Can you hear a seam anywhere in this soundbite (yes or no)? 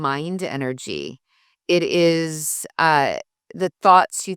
no